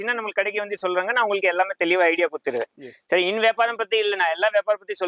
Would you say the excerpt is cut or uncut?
uncut